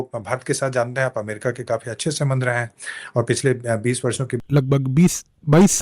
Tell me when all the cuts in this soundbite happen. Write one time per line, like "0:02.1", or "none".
0:04.4